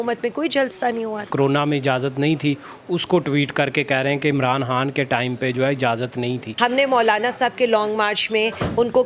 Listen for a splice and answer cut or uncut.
cut